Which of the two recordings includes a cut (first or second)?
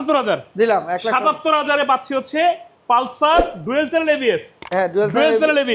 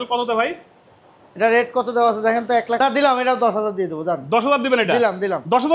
second